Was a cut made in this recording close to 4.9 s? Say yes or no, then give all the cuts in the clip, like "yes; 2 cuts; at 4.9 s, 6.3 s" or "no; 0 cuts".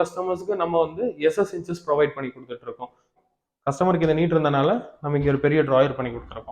no; 1 cut; at 3.0 s